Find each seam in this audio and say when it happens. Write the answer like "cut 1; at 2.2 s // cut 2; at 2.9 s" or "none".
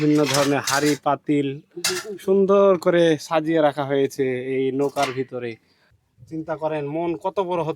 cut 1; at 5.6 s

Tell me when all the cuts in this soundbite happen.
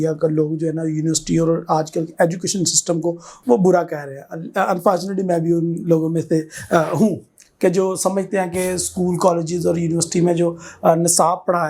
none

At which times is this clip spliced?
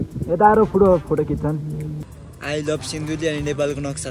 cut 1; at 2.0 s

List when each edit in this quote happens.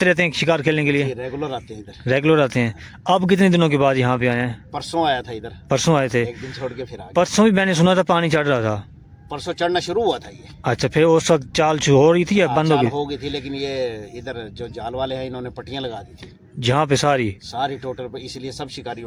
none

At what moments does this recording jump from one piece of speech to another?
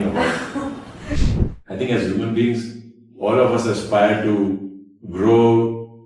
cut 1; at 1.2 s

